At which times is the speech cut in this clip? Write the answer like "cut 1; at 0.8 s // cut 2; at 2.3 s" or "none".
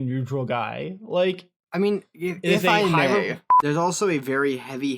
cut 1; at 3.5 s